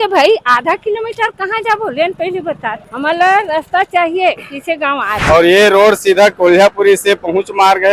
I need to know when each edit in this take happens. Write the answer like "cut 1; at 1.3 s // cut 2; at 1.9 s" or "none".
cut 1; at 2.9 s // cut 2; at 5.1 s

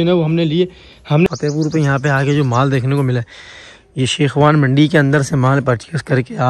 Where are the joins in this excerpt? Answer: cut 1; at 1.3 s

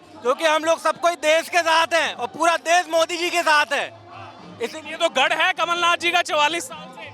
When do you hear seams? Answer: none

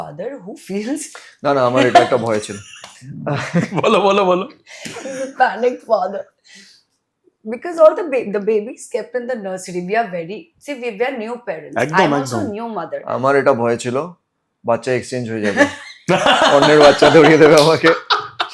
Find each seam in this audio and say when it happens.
none

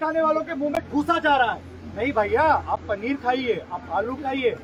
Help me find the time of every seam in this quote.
none

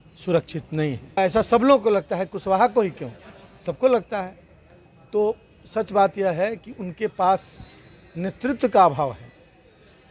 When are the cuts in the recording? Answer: cut 1; at 1.2 s

